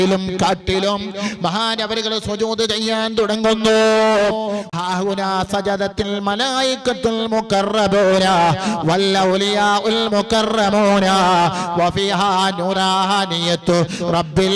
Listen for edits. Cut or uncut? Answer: cut